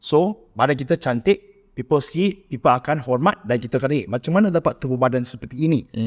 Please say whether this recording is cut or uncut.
uncut